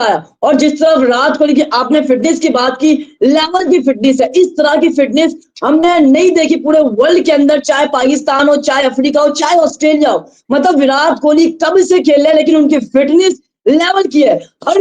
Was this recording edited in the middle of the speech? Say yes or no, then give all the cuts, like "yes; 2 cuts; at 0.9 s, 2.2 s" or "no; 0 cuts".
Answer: no; 0 cuts